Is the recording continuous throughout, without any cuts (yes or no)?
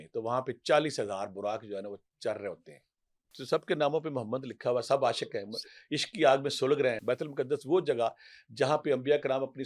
no